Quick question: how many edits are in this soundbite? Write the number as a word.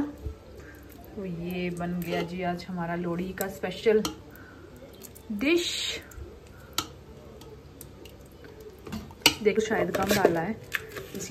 one